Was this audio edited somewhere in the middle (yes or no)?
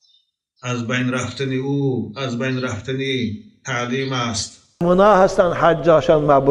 yes